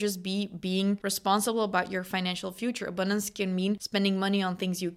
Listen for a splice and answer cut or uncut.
cut